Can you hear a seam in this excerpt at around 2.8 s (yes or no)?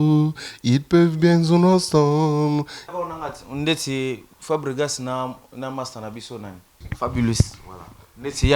yes